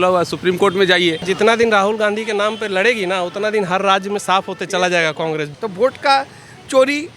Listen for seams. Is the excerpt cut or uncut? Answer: cut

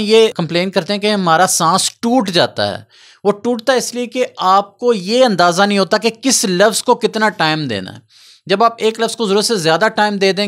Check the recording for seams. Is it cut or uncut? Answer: uncut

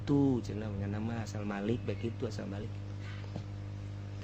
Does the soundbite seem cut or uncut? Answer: uncut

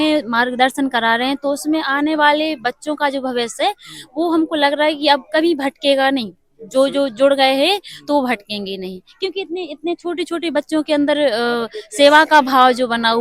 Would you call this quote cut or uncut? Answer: uncut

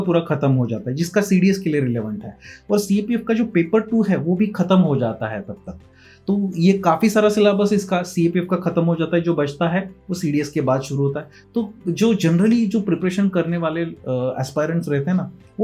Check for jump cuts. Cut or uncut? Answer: uncut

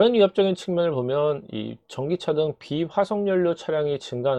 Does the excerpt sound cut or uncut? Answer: uncut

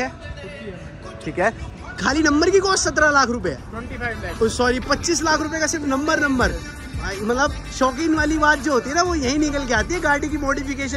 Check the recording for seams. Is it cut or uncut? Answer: cut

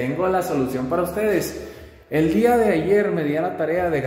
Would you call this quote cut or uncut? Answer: uncut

